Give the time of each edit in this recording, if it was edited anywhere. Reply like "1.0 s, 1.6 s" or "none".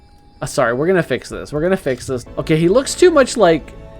2.2 s